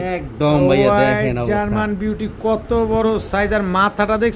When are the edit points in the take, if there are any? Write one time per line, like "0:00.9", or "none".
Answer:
none

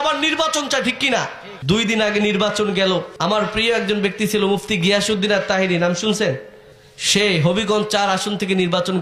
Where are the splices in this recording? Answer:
none

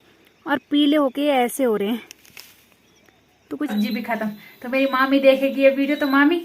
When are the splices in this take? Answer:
0:03.7

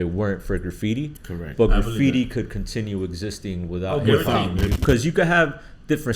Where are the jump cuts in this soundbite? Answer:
0:04.8

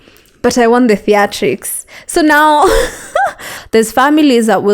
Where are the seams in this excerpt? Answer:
0:03.5

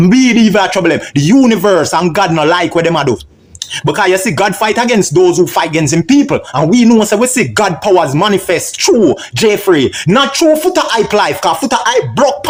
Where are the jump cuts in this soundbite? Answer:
none

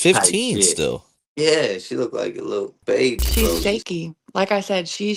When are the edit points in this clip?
0:03.2

